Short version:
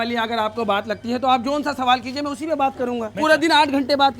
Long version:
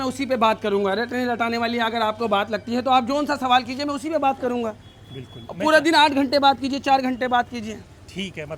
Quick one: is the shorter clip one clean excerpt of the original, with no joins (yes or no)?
no